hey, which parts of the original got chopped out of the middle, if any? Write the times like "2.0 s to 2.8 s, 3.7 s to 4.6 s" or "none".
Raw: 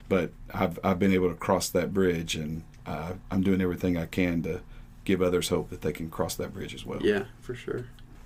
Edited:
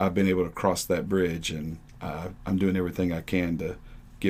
none

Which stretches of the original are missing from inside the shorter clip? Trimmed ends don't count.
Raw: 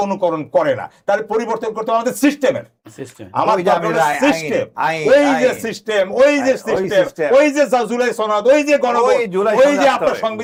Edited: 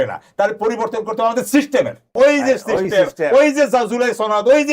2.8 s to 6.1 s

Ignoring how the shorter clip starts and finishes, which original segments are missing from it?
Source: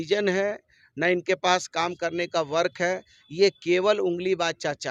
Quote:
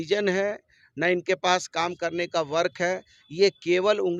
none

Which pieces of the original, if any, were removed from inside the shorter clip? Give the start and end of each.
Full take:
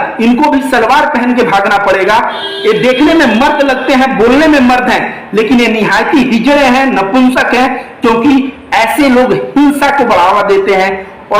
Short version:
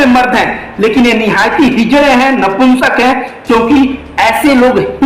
none

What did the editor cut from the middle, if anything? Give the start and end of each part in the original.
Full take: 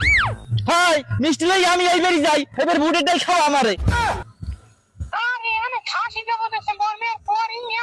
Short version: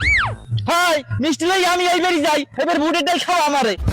none

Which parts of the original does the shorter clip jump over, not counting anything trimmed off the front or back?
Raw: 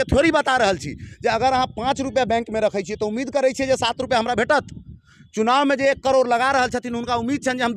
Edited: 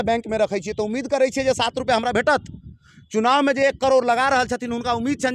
none

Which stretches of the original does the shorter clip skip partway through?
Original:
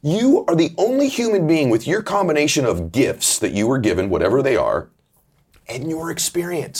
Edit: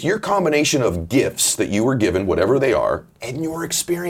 5.0 s to 5.6 s

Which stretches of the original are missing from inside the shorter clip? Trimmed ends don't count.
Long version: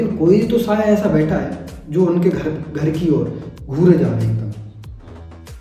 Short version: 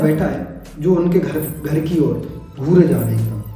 none

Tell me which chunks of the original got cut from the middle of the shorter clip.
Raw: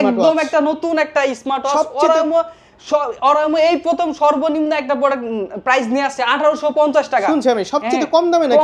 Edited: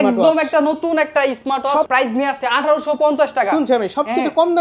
1.9 s to 5.6 s

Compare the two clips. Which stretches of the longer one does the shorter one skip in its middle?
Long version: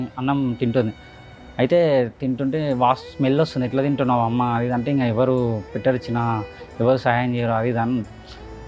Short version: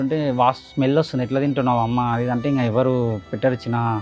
none

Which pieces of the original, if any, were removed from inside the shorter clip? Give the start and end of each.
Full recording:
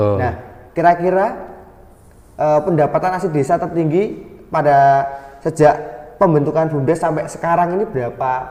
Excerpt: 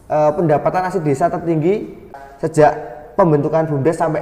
4.4 s to 5.2 s

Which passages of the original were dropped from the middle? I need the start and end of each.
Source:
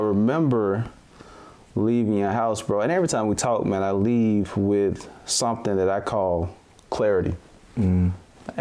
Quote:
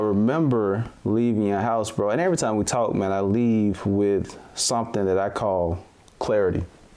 0.9 s to 1.6 s

